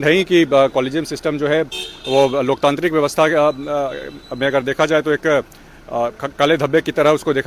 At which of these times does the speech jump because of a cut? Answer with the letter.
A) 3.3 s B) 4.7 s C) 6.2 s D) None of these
D